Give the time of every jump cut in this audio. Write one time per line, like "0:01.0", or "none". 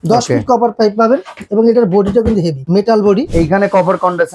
0:01.4
0:02.6
0:03.3